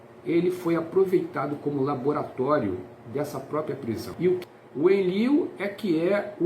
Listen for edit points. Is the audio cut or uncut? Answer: cut